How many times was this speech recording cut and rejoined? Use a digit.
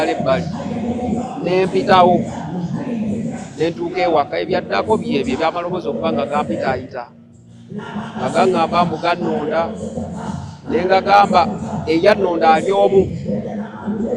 0